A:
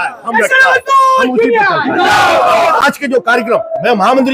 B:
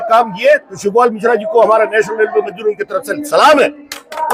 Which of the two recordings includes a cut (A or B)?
A